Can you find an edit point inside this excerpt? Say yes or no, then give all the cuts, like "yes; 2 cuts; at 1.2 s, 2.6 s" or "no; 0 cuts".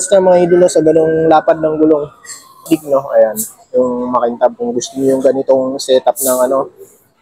yes; 1 cut; at 2.6 s